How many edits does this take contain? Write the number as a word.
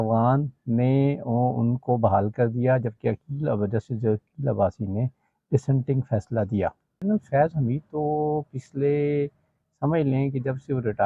one